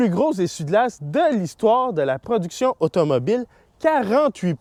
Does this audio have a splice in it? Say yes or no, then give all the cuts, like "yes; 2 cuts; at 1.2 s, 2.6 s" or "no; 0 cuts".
no; 0 cuts